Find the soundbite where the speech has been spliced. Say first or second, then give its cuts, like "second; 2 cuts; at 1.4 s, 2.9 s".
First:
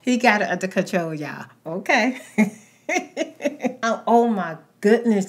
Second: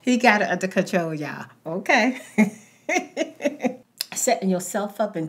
second; 1 cut; at 3.8 s